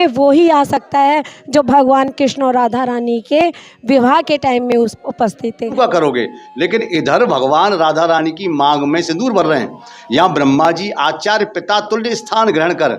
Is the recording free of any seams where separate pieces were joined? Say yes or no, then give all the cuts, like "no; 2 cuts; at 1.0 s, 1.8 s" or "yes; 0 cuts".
no; 1 cut; at 5.7 s